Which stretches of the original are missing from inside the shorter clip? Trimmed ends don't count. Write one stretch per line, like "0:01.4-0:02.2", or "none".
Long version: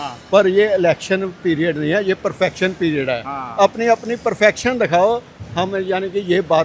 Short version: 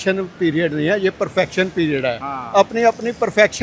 none